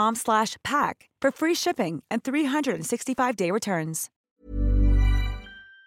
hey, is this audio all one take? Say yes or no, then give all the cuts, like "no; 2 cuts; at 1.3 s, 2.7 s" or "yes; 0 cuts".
yes; 0 cuts